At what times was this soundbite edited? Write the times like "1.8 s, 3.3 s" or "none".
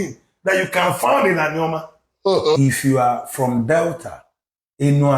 2.6 s